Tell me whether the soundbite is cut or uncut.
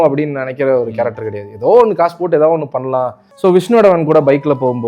cut